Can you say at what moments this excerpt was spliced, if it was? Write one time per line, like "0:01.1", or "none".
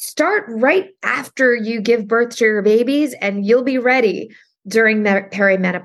none